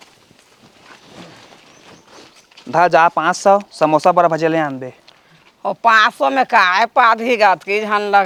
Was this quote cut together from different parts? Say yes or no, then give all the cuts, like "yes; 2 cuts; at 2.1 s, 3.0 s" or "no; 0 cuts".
no; 0 cuts